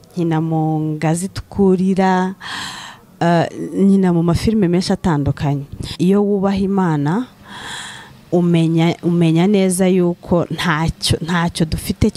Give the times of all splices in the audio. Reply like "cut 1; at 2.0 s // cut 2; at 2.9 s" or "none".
cut 1; at 6.0 s

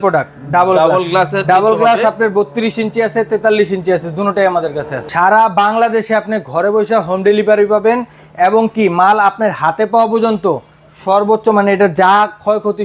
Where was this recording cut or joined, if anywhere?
cut 1; at 4.9 s

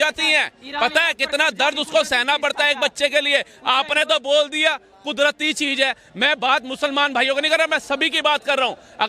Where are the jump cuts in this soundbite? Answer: none

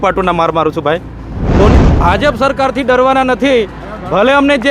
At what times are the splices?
cut 1; at 1.8 s

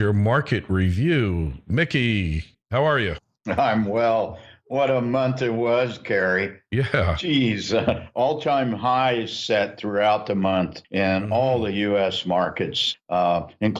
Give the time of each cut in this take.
none

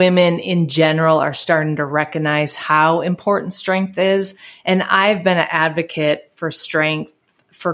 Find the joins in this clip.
none

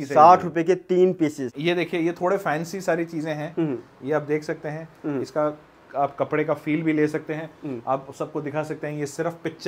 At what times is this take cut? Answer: cut 1; at 1.5 s

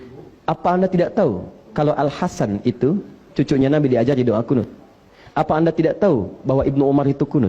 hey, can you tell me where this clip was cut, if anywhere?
none

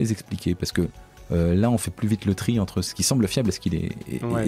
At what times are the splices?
cut 1; at 1.1 s // cut 2; at 2.9 s

